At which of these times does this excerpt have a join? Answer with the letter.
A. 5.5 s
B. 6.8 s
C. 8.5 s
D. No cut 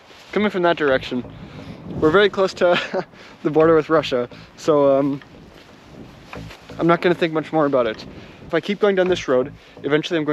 C